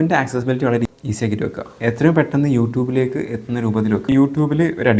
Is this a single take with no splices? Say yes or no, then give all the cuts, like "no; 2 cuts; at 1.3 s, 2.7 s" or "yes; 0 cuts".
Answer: no; 2 cuts; at 1.0 s, 4.1 s